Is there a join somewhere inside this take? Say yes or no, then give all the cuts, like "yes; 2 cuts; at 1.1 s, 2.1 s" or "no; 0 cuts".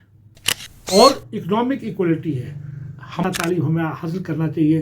yes; 1 cut; at 3.2 s